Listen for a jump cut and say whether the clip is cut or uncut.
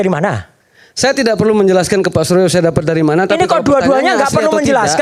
uncut